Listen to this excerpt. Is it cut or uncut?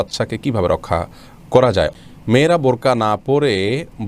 cut